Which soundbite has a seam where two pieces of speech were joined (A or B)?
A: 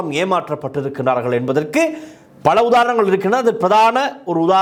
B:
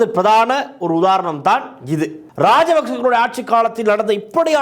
B